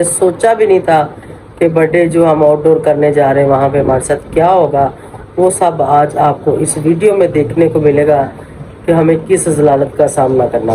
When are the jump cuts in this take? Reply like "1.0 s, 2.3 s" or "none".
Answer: none